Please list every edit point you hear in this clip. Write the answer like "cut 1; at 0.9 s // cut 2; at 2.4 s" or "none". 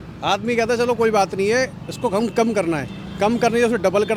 none